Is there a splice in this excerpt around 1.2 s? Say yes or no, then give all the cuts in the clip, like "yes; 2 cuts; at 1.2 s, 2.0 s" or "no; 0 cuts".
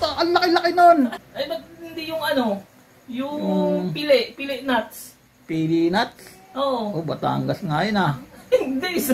yes; 1 cut; at 1.2 s